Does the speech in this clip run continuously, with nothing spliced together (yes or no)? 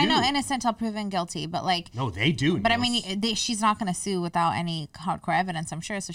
yes